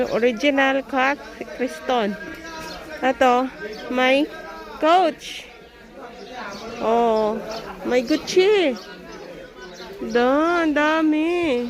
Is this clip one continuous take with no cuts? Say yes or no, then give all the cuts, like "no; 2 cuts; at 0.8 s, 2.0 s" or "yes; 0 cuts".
yes; 0 cuts